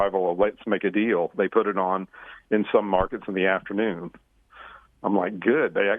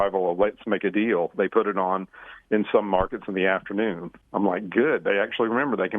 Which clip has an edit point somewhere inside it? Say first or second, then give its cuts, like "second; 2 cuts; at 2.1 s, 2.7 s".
second; 1 cut; at 4.1 s